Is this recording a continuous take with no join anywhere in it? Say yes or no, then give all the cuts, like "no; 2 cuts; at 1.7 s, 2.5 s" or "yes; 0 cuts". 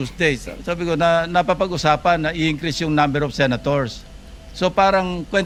yes; 0 cuts